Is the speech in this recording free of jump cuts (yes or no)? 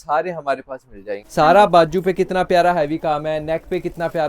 no